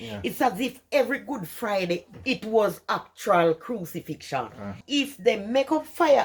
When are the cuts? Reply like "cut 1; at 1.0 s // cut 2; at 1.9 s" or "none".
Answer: cut 1; at 4.8 s